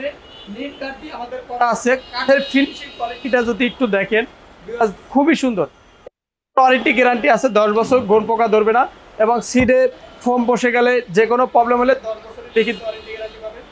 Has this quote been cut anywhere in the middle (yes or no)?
no